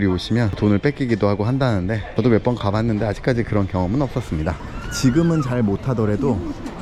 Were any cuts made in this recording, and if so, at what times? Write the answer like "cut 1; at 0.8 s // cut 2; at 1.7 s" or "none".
cut 1; at 4.6 s